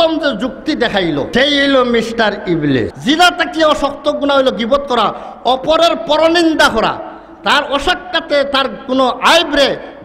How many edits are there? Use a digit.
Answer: 2